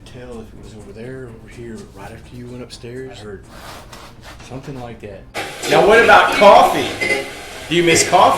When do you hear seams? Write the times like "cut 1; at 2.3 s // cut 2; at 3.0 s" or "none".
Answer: cut 1; at 3.2 s // cut 2; at 5.5 s